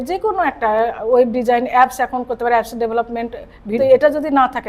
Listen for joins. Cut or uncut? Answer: cut